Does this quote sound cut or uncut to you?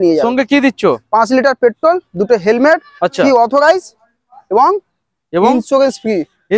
uncut